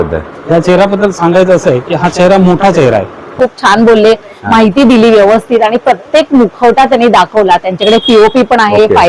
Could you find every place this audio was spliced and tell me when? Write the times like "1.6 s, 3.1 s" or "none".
3.3 s